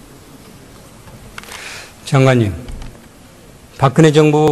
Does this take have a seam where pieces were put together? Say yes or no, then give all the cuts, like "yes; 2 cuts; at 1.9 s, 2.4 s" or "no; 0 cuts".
no; 0 cuts